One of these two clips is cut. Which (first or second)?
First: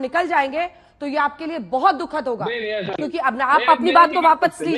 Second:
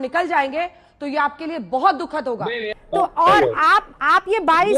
second